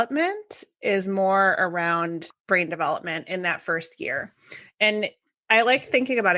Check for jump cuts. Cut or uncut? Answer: cut